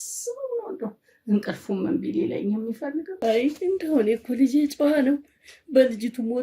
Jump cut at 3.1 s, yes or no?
yes